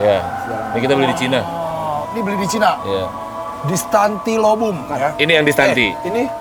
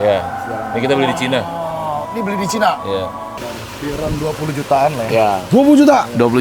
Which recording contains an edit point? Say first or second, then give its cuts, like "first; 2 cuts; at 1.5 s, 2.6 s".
second; 1 cut; at 3.3 s